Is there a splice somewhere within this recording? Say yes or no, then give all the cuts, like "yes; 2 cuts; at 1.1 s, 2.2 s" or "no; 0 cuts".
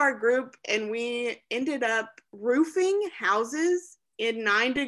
no; 0 cuts